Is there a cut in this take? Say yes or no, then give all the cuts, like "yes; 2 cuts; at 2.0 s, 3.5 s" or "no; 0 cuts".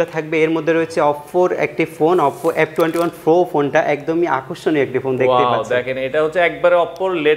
no; 0 cuts